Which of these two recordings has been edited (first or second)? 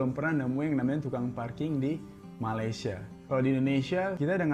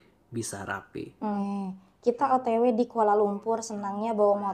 second